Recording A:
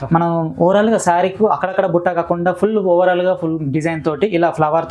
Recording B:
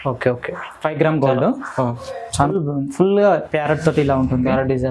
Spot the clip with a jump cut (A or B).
B